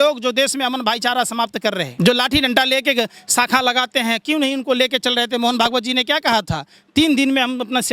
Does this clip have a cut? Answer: yes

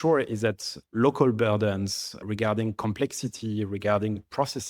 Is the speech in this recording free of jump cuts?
yes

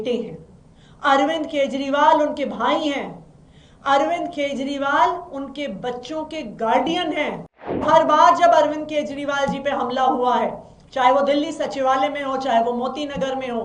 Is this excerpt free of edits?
no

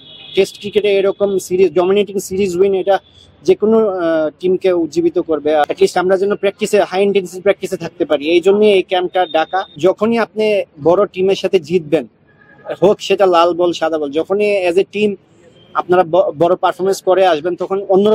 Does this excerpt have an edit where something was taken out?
yes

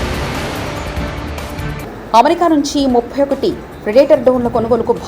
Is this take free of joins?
no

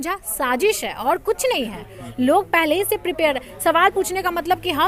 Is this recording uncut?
yes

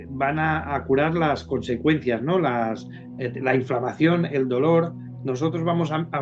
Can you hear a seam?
no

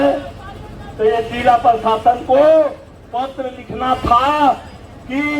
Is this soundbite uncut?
yes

